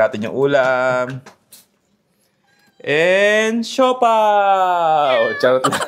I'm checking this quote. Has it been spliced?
no; 0 cuts

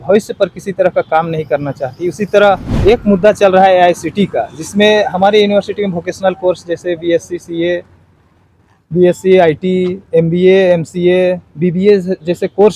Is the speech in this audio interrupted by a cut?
yes; 1 cut; at 2.7 s

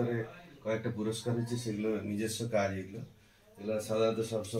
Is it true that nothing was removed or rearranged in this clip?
yes; 0 cuts

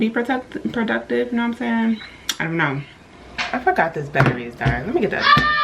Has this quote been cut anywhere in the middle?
no; 0 cuts

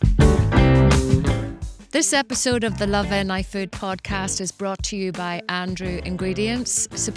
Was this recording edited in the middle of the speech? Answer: yes; 1 cut; at 1.3 s

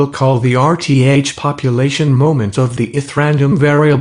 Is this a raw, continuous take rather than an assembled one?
no; 1 cut; at 1.5 s

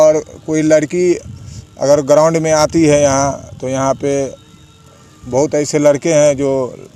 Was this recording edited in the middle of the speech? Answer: no; 0 cuts

